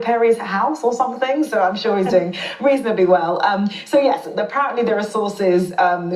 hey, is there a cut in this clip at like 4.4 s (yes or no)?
no